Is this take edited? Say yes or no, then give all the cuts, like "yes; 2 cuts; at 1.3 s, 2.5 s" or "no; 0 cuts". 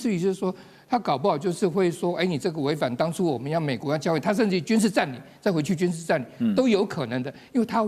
no; 0 cuts